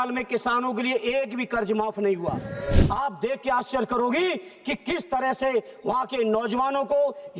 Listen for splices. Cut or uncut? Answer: cut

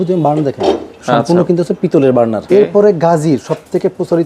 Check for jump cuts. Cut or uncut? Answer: cut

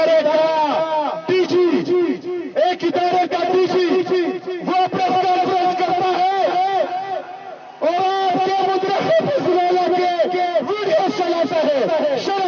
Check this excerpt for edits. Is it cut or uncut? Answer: uncut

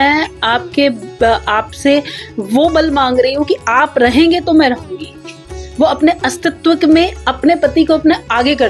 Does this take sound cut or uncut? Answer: uncut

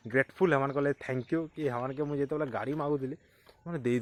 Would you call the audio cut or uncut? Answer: uncut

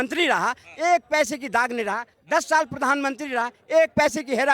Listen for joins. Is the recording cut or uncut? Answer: uncut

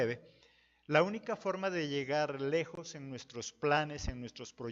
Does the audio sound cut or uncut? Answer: cut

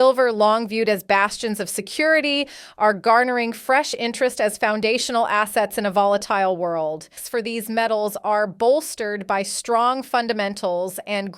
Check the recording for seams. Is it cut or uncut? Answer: cut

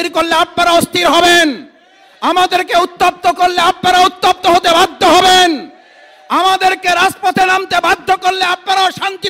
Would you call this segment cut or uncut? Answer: uncut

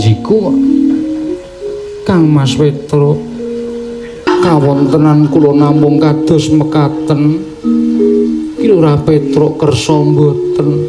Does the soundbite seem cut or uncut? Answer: cut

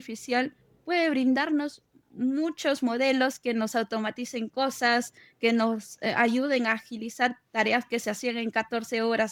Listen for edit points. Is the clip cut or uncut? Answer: uncut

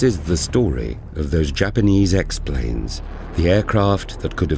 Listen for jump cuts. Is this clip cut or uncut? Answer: cut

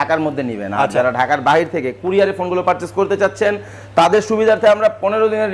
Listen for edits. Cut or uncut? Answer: uncut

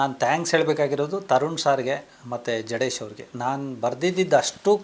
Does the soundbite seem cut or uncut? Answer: uncut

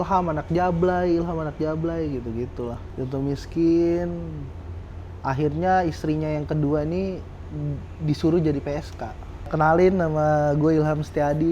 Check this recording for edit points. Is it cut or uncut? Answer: cut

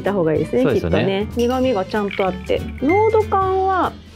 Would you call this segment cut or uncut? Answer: cut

